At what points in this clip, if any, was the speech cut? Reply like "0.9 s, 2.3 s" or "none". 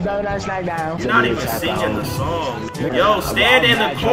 2.9 s